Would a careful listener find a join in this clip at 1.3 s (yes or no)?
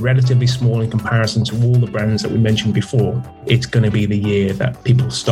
no